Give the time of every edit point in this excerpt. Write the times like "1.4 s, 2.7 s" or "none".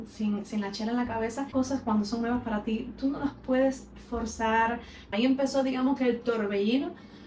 1.5 s, 5.1 s